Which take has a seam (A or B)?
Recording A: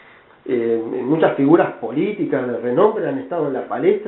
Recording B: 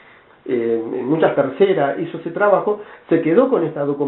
A